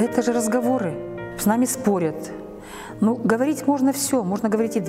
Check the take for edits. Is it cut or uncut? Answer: cut